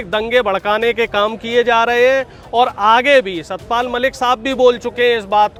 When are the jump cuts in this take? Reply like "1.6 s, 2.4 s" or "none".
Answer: none